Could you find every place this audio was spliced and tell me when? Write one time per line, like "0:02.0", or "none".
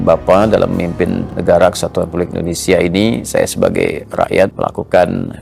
0:01.3
0:04.5